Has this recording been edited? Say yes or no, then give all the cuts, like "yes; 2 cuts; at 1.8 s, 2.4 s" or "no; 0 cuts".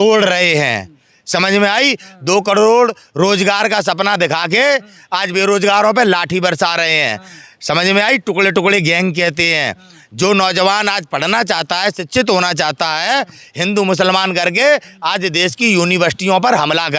no; 0 cuts